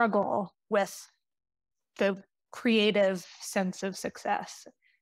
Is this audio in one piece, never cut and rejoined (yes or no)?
no